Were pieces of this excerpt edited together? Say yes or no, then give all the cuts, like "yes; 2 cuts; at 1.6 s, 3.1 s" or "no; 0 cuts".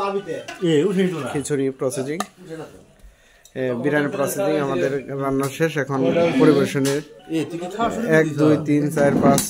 no; 0 cuts